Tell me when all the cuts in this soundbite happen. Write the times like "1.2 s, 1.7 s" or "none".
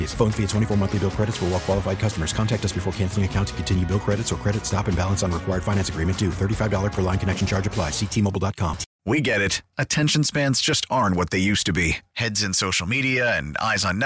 8.9 s